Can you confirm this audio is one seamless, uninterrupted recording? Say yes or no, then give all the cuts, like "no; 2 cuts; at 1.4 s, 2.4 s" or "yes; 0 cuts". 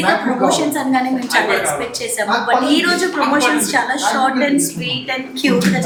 yes; 0 cuts